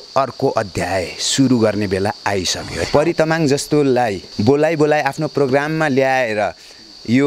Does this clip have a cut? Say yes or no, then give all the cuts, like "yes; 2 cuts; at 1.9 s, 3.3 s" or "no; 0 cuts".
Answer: yes; 2 cuts; at 2.7 s, 4.3 s